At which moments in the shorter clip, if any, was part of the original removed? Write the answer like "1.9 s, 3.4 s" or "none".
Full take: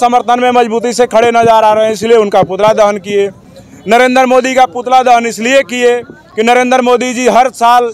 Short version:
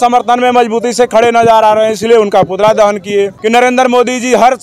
3.4 s